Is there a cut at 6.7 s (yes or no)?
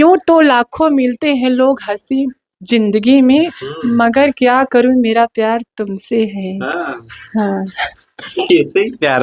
no